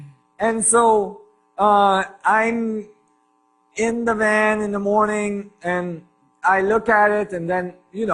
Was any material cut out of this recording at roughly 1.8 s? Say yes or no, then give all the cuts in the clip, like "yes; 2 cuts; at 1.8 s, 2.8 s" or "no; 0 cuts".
yes; 1 cut; at 1.8 s